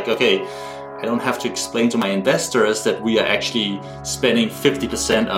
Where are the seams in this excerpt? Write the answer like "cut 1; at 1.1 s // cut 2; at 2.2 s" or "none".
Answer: none